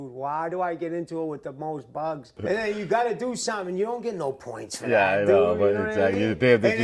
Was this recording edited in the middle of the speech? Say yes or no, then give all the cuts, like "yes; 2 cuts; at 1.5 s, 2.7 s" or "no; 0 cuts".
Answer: yes; 1 cut; at 2.4 s